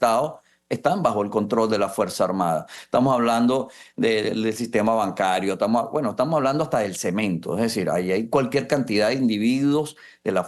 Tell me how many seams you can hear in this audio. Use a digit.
0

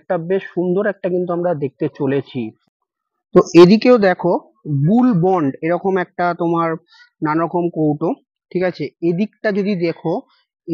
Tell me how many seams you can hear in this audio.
1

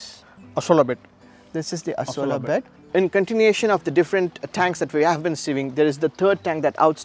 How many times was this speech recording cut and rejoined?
1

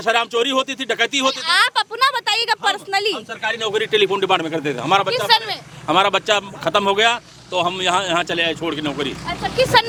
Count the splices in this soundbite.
0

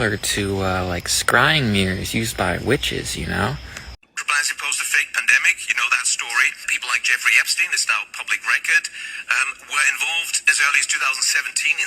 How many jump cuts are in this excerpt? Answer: 1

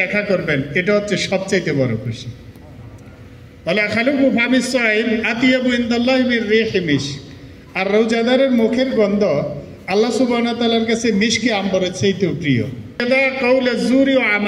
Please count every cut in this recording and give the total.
1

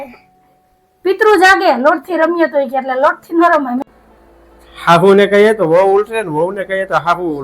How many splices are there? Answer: 1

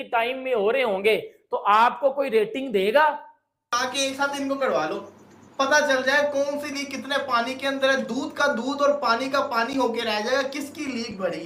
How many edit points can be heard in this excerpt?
1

